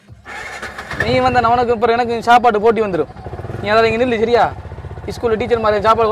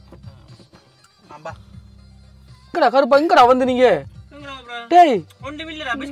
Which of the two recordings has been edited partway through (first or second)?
second